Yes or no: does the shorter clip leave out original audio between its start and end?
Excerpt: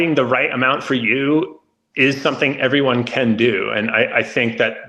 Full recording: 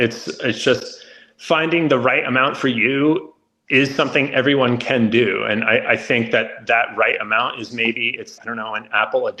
no